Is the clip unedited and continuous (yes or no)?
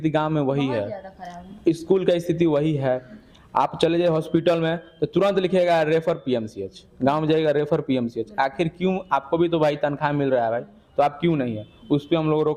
yes